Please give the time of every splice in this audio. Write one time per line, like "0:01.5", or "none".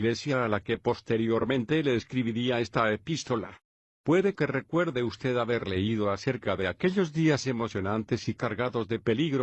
0:06.4